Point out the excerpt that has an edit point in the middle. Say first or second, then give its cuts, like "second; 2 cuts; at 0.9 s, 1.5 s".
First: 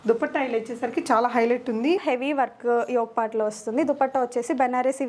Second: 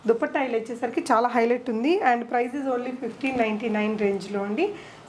first; 1 cut; at 2.0 s